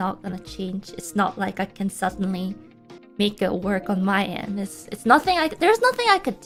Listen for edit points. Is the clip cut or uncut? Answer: uncut